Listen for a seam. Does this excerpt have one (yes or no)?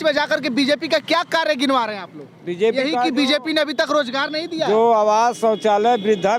no